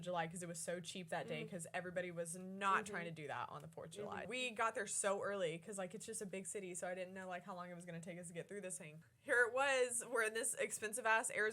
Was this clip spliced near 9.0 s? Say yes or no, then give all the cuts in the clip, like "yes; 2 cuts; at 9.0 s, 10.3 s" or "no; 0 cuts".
yes; 2 cuts; at 4.3 s, 9.0 s